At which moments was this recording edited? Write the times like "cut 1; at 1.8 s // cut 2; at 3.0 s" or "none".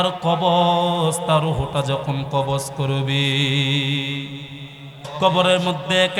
cut 1; at 5.0 s

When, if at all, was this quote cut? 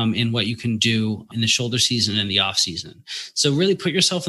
cut 1; at 1.3 s

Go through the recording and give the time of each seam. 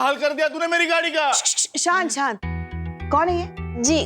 none

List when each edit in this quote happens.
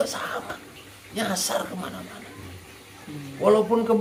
none

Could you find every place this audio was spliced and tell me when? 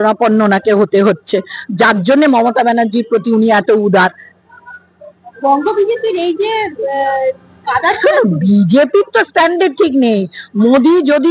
none

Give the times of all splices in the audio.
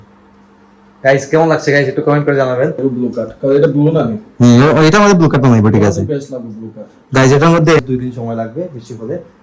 cut 1; at 2.8 s // cut 2; at 7.8 s

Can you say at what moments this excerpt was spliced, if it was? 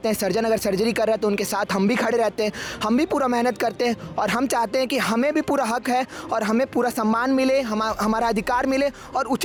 none

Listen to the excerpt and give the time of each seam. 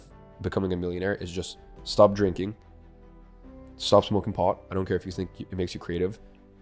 none

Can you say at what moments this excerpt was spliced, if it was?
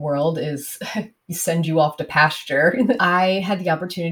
cut 1; at 3.0 s

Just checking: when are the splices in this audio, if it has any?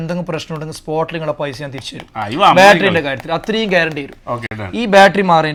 none

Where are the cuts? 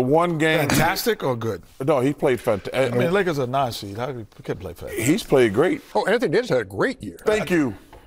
cut 1; at 5.8 s

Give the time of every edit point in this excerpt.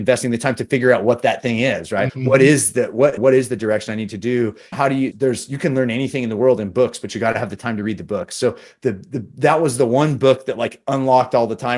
none

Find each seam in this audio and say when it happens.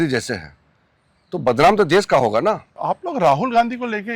cut 1; at 2.8 s

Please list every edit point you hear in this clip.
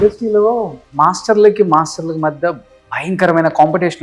none

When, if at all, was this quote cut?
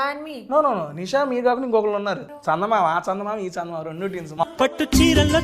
cut 1; at 2.3 s // cut 2; at 4.3 s

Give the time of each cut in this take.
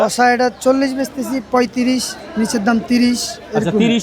none

